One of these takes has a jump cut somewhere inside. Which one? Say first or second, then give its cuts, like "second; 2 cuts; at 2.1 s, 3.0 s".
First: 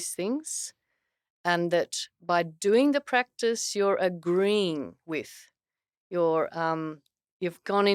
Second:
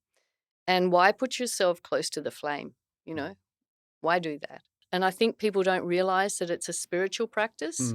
second; 1 cut; at 4.8 s